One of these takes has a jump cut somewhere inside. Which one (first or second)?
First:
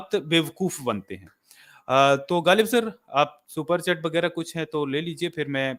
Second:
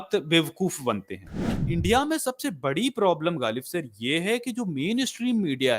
second